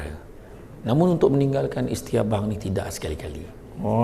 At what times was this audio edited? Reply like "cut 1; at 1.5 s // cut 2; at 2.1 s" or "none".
none